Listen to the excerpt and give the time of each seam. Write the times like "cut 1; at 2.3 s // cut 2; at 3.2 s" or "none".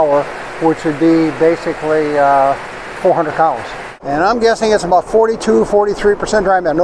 cut 1; at 3.9 s